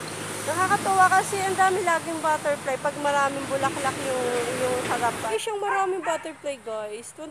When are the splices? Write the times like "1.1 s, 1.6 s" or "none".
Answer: 5.3 s